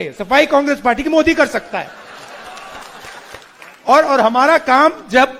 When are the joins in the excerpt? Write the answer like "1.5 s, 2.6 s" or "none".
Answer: 3.5 s